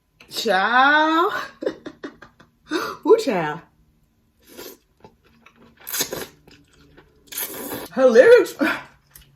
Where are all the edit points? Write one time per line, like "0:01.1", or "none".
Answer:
0:07.9